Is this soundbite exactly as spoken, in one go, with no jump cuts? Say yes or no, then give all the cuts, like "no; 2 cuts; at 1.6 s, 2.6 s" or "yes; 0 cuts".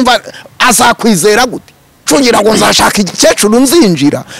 no; 1 cut; at 2.1 s